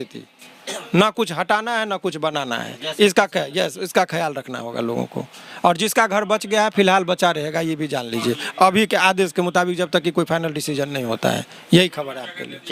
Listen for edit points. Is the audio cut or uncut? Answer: uncut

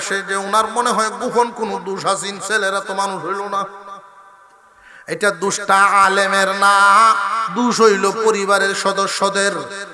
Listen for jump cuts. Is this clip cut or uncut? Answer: uncut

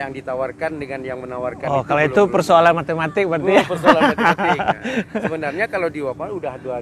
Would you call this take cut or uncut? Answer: uncut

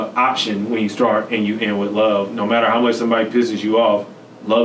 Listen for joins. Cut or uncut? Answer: uncut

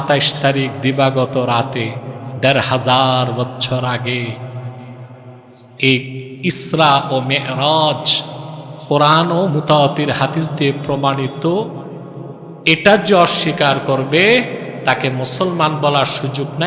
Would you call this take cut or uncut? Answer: uncut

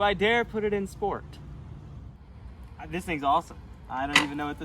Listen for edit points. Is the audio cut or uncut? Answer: cut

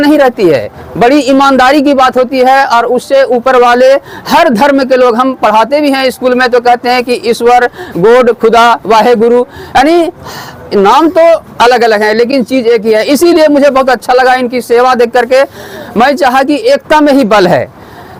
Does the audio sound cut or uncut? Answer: uncut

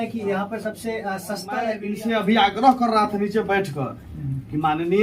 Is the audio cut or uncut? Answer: cut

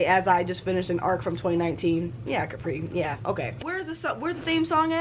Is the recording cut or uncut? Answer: cut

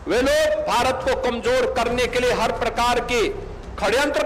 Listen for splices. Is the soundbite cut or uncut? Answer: uncut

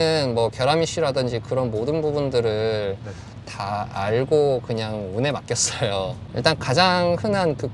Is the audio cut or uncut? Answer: cut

